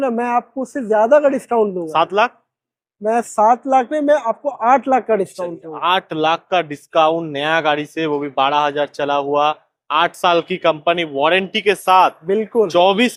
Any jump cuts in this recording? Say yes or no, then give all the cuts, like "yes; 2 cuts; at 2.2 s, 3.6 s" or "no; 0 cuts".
no; 0 cuts